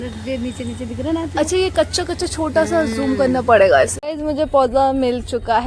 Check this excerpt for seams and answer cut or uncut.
cut